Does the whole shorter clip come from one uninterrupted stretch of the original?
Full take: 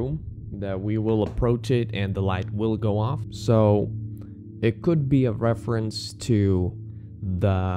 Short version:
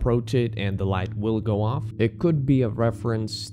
no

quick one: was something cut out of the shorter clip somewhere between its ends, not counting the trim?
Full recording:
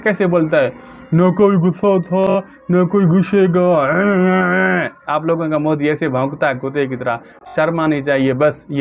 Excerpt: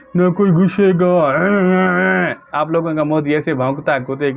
no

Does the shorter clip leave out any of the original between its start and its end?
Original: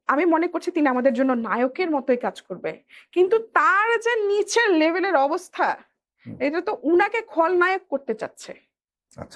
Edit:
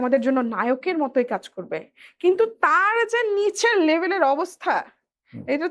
no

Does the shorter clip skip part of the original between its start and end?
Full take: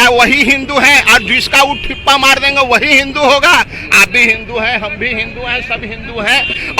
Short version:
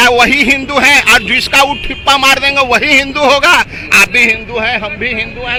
no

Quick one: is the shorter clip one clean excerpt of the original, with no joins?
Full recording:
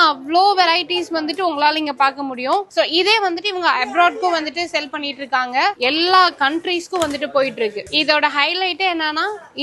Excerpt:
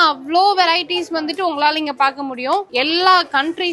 no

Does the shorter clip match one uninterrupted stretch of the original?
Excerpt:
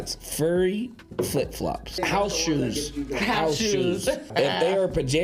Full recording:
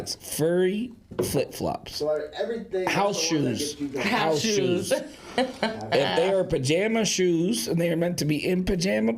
no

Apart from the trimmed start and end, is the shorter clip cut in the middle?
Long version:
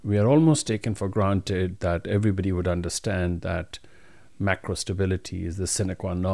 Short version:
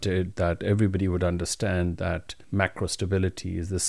yes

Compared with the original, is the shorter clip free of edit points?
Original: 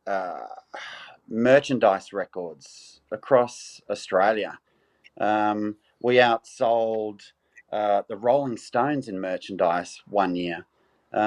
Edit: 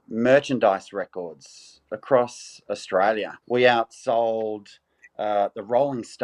no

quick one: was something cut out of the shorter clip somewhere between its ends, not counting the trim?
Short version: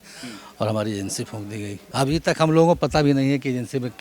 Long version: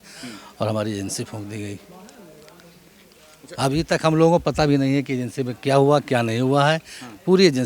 yes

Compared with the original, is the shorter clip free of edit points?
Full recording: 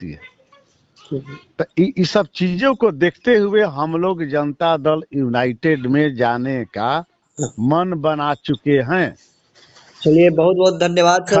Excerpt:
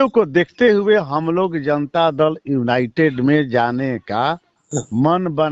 yes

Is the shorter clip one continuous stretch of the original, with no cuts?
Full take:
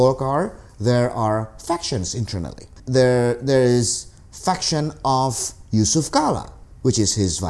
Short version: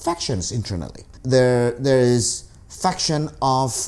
yes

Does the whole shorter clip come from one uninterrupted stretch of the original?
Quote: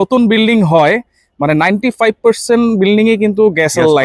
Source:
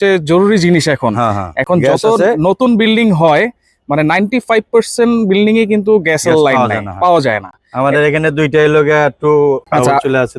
yes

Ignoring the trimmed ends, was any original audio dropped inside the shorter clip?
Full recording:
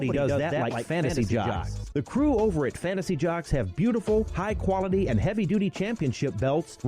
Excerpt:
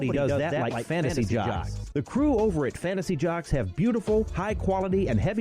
no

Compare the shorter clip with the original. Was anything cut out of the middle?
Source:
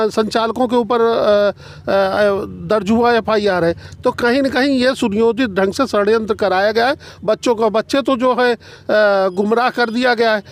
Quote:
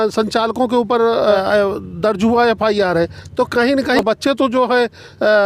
yes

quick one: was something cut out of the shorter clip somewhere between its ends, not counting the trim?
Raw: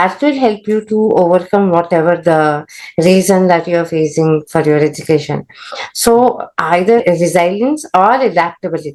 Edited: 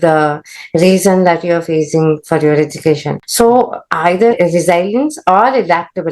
yes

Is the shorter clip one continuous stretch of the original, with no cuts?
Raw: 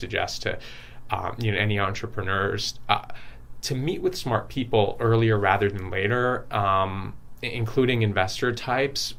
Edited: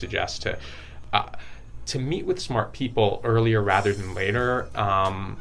no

